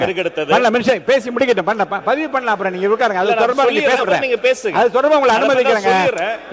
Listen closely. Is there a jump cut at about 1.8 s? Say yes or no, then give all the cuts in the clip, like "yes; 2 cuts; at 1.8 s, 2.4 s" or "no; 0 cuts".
no; 0 cuts